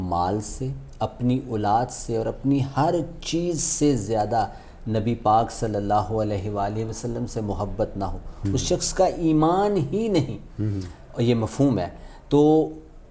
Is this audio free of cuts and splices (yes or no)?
yes